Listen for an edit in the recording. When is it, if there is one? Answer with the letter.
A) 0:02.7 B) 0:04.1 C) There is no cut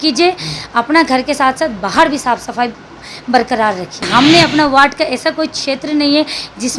B